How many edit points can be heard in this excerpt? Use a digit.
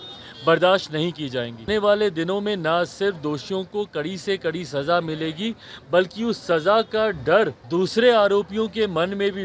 2